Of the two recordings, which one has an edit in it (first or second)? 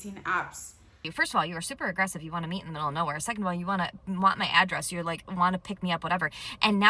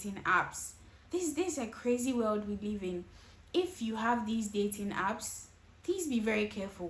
first